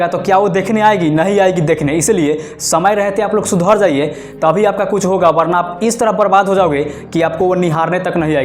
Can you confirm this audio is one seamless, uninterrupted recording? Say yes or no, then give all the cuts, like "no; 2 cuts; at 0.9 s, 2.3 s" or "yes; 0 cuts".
yes; 0 cuts